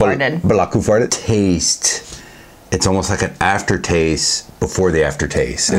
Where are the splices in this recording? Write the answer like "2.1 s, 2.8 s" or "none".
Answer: 1.1 s